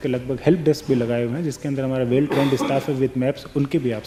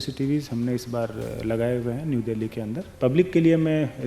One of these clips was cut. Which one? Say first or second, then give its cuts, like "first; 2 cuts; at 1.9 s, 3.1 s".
second; 1 cut; at 2.9 s